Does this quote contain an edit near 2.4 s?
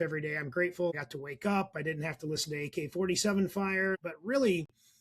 no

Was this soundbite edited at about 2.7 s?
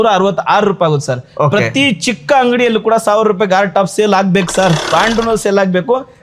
no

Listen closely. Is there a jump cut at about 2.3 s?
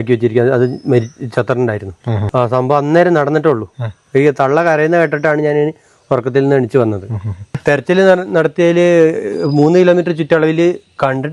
yes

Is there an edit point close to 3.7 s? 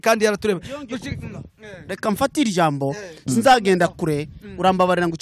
no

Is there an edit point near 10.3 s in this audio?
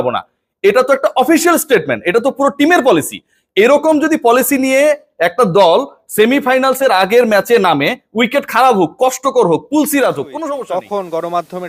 yes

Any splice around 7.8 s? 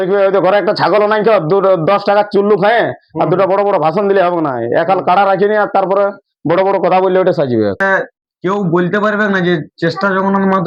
yes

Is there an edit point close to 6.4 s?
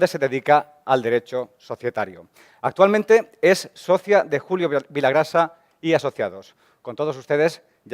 yes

